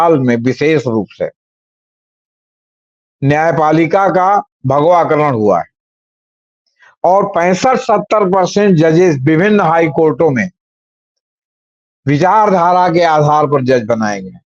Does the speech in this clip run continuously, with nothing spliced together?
yes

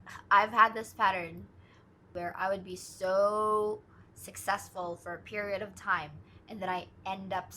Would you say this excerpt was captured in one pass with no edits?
no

